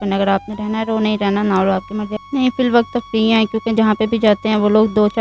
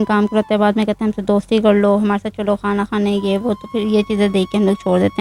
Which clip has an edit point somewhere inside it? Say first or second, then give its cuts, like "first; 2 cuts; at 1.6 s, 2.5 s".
first; 1 cut; at 2.2 s